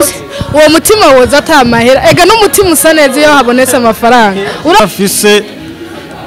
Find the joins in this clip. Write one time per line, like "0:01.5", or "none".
0:04.8